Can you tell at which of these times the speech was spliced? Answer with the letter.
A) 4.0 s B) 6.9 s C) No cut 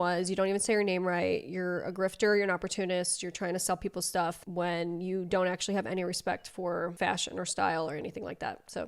B